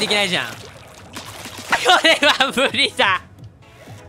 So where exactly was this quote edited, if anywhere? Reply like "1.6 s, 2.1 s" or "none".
1.8 s